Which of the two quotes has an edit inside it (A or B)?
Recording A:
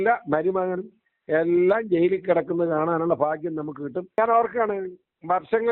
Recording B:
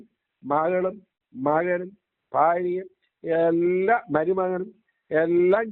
A